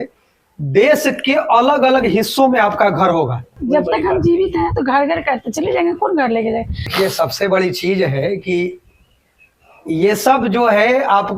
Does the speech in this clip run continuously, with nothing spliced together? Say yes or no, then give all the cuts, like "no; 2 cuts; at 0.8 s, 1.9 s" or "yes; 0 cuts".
no; 2 cuts; at 3.6 s, 6.9 s